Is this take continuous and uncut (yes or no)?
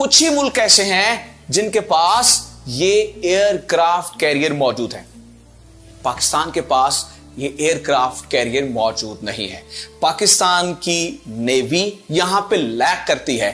yes